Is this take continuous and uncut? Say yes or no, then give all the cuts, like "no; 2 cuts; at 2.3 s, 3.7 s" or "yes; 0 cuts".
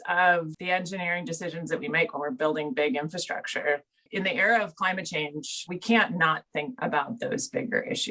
yes; 0 cuts